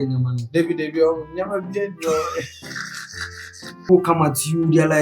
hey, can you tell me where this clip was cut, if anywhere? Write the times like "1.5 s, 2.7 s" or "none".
3.8 s